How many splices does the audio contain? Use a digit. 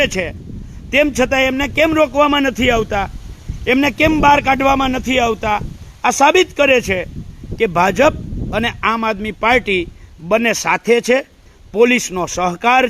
0